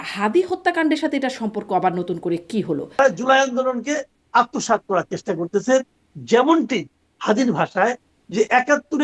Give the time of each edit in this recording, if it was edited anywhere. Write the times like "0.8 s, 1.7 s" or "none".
3.0 s